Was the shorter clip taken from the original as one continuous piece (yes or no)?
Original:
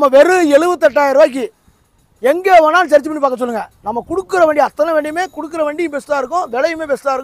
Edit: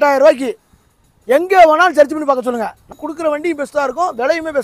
no